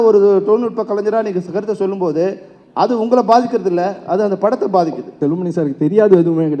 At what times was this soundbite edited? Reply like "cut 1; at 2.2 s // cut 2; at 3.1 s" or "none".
cut 1; at 5.2 s